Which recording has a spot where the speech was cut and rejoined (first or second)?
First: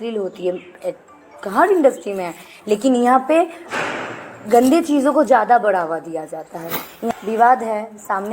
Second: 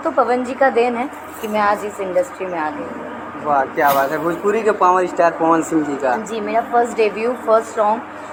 first